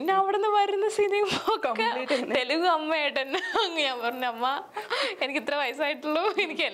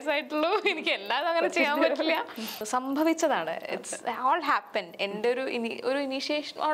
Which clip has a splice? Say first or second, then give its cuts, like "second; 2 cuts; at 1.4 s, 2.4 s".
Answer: second; 1 cut; at 2.6 s